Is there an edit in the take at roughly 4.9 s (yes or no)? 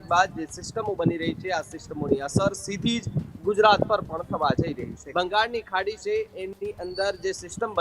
yes